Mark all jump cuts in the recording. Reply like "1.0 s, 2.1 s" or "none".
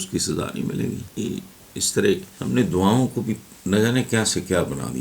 1.1 s, 2.3 s